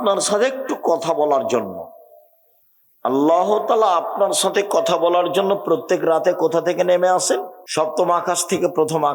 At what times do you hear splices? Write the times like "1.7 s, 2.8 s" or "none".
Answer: 7.6 s